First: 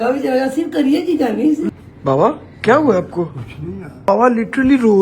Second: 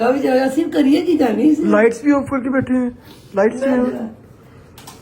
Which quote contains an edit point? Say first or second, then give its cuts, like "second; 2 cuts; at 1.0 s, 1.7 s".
first; 2 cuts; at 1.7 s, 4.1 s